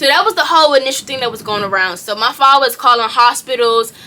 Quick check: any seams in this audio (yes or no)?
no